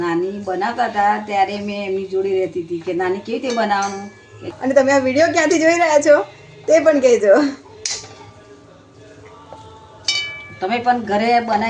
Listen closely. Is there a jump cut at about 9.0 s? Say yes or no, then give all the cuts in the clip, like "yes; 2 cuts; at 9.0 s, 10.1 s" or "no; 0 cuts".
no; 1 cut; at 4.5 s